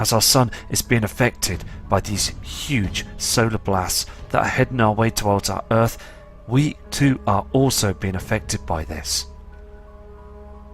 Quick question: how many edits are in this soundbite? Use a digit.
1